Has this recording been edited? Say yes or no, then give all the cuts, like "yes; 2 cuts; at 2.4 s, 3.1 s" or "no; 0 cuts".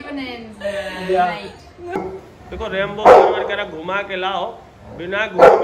yes; 1 cut; at 2.0 s